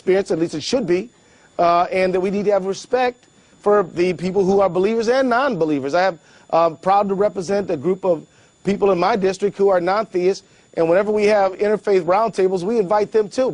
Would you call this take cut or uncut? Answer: uncut